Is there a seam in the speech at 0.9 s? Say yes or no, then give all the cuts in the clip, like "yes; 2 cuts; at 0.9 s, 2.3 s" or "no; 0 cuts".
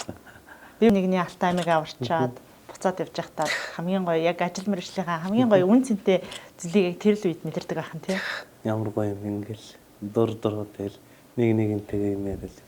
yes; 1 cut; at 0.9 s